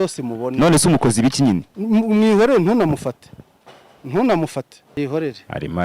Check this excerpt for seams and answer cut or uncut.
cut